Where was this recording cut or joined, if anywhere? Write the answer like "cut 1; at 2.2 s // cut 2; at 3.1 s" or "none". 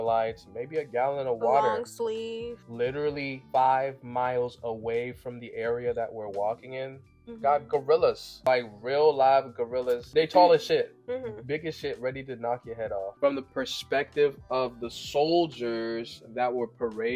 cut 1; at 8.3 s // cut 2; at 10.0 s // cut 3; at 13.1 s